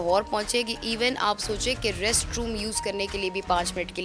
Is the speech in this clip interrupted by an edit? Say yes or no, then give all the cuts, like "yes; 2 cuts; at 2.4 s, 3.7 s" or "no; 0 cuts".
no; 0 cuts